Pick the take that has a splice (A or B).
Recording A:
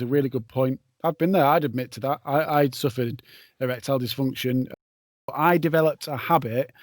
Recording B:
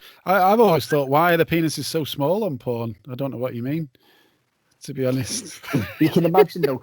A